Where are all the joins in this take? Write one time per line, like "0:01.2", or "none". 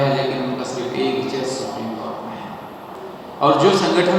0:03.0